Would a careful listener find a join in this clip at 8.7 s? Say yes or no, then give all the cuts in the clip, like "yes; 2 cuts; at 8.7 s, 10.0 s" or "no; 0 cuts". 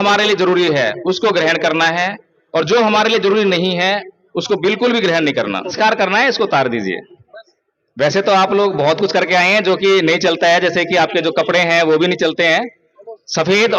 no; 1 cut; at 5.7 s